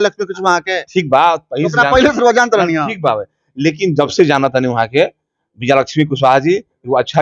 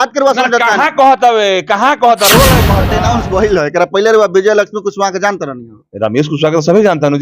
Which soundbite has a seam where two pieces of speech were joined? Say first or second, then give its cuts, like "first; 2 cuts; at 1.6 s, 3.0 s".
second; 1 cut; at 2.8 s